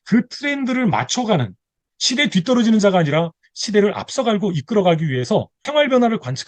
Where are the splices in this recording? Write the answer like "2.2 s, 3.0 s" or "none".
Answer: 5.6 s